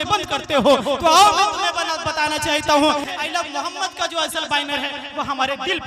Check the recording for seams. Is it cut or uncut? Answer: cut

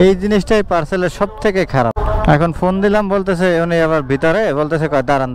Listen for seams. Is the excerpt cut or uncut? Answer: uncut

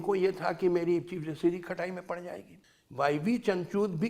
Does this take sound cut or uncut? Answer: uncut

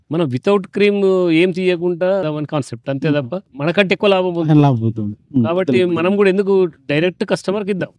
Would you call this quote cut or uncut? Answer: uncut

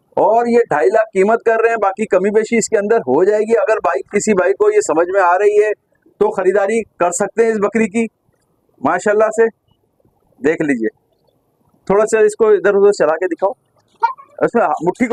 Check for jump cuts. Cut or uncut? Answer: uncut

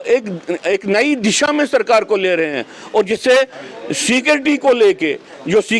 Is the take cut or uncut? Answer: uncut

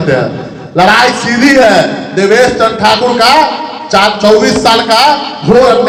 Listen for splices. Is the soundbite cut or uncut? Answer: uncut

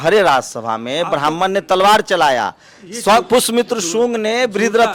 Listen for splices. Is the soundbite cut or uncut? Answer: uncut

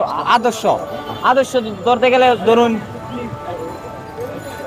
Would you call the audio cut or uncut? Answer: uncut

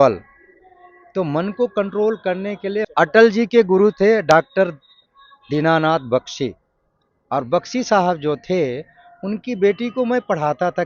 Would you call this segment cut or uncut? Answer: cut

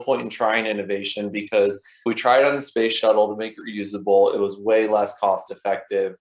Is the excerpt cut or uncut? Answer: cut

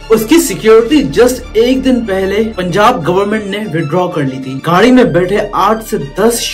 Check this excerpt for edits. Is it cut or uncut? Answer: cut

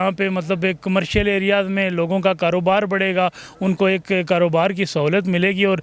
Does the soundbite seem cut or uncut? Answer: uncut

